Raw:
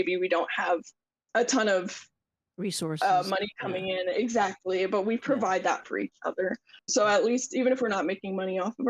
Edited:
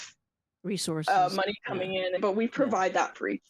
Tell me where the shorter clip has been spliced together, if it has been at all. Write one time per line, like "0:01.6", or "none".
0:02.2

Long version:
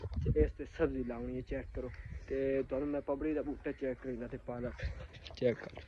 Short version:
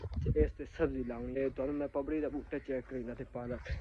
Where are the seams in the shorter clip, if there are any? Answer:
0:01.4

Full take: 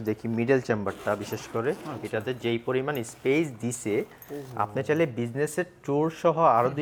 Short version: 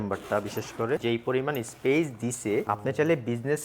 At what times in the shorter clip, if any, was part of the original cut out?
0:01.0
0:02.6

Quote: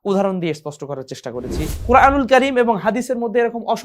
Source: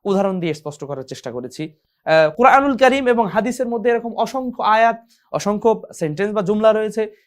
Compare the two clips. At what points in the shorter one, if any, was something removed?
0:01.8

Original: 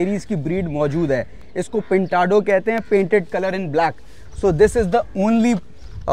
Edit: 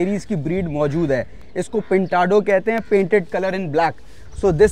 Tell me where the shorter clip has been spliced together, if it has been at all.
none

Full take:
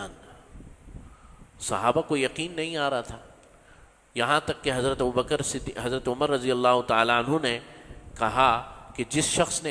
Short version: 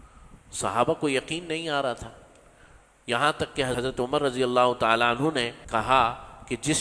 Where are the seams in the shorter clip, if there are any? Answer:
0:03.7
0:05.6

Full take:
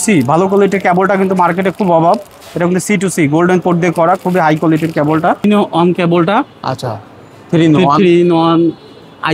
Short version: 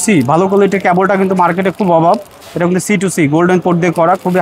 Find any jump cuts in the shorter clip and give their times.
none

